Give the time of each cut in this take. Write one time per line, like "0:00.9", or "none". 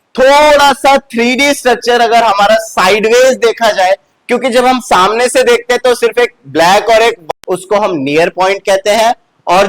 0:07.3